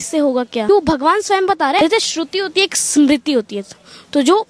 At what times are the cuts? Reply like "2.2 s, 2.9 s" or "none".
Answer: 0.7 s, 1.8 s

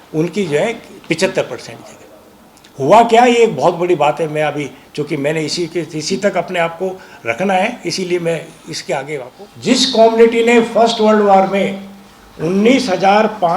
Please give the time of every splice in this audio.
9.3 s

